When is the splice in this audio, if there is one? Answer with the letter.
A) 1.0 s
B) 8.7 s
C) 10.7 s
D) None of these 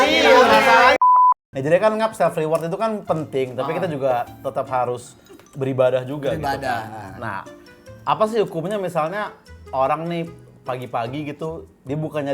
A